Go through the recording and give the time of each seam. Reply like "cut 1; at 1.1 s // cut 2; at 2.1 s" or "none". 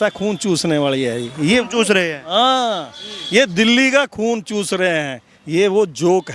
none